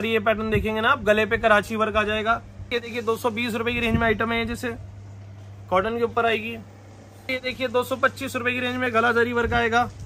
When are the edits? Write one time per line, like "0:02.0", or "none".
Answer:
0:02.7
0:07.4